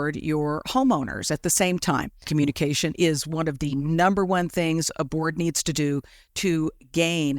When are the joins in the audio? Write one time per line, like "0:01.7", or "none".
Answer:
0:02.2